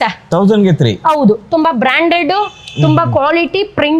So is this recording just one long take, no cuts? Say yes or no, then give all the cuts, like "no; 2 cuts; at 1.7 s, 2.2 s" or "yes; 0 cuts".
yes; 0 cuts